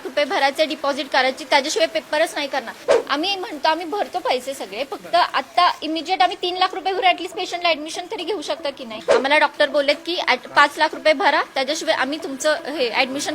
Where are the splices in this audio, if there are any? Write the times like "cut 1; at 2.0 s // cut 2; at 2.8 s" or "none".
cut 1; at 2.8 s // cut 2; at 9.0 s